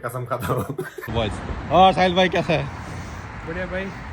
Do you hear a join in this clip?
yes; 1 cut; at 1.1 s

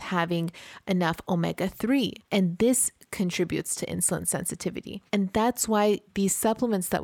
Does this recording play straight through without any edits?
no; 3 cuts; at 2.2 s, 5.0 s, 6.1 s

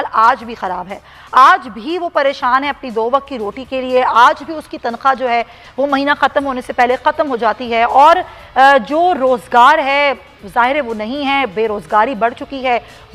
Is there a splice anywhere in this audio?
no; 0 cuts

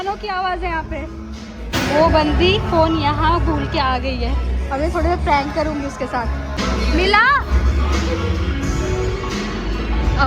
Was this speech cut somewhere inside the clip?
no; 0 cuts

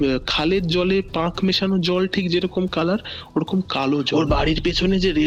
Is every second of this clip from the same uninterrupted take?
no; 1 cut; at 4.1 s

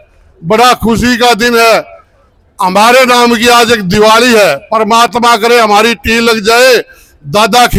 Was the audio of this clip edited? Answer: no; 0 cuts

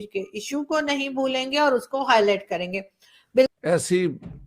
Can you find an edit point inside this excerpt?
yes; 1 cut; at 3.5 s

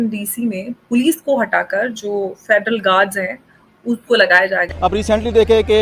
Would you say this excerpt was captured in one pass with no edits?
no; 1 cut; at 4.6 s

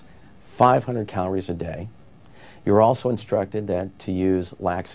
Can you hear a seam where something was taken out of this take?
no; 0 cuts

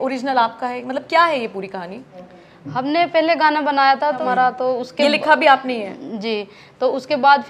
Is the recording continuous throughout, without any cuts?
no; 1 cut; at 4.2 s

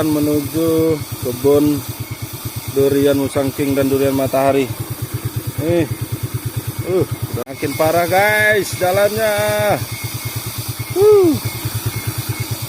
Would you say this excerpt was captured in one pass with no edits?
no; 1 cut; at 7.4 s

